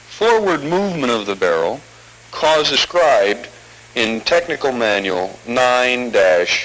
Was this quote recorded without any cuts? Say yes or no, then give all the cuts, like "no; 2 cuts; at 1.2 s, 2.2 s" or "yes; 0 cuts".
yes; 0 cuts